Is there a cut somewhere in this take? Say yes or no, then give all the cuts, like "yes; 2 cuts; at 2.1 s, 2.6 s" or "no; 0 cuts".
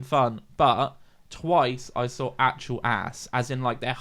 no; 0 cuts